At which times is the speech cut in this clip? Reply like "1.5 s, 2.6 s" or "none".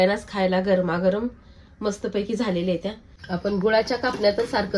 3.1 s